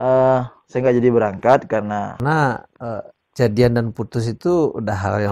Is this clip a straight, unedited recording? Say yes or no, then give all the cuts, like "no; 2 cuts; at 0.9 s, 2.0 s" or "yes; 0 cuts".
no; 1 cut; at 2.1 s